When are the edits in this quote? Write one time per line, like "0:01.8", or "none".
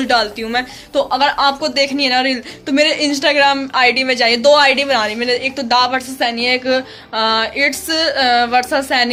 none